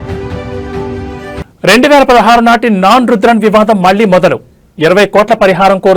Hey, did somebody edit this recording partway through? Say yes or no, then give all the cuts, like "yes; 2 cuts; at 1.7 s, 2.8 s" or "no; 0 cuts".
yes; 1 cut; at 1.4 s